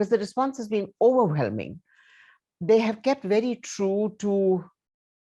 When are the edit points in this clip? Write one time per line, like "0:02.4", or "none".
none